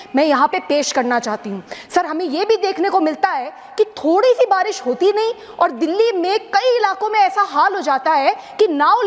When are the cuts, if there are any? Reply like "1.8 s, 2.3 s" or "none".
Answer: none